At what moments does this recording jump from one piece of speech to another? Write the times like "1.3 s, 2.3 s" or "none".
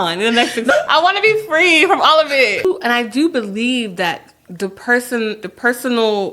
0.7 s, 2.6 s